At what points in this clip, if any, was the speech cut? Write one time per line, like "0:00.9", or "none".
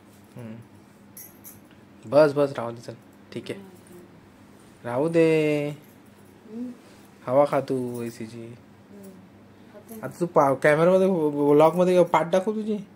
none